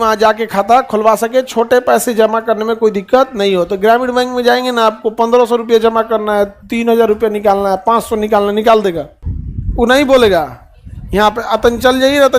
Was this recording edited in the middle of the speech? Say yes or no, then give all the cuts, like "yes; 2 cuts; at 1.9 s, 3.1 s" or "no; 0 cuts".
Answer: no; 0 cuts